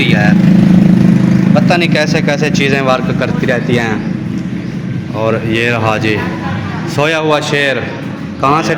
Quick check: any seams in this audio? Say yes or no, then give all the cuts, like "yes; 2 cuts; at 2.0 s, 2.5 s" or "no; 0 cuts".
no; 0 cuts